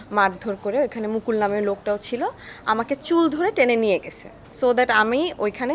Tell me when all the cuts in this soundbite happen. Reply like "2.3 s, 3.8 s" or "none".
none